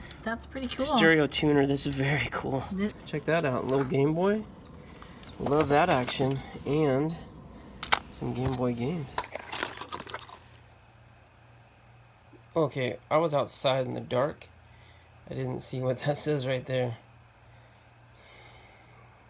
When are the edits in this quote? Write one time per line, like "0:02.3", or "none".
0:02.9
0:09.3